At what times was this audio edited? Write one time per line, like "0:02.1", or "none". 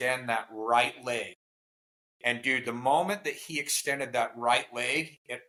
none